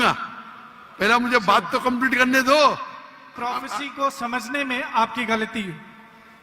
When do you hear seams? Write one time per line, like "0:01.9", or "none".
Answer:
0:03.3